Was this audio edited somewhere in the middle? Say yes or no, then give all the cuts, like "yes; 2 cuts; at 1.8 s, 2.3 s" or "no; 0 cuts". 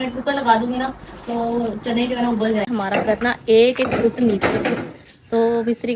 yes; 1 cut; at 2.7 s